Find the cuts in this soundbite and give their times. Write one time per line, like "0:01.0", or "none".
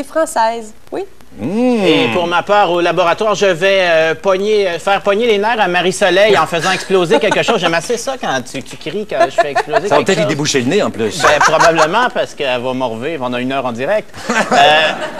none